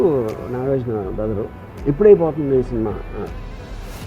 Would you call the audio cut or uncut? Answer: cut